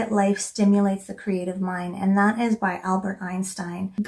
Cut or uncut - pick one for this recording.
uncut